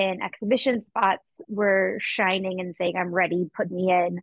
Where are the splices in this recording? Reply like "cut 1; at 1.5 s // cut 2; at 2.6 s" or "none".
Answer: cut 1; at 1.4 s